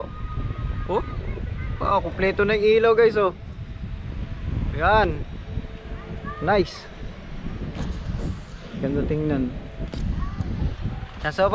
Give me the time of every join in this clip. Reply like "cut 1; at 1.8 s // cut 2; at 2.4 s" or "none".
none